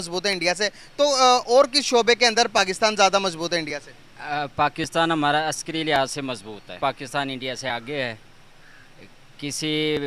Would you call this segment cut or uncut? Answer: cut